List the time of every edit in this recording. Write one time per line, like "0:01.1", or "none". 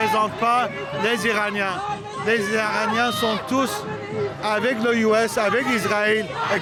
none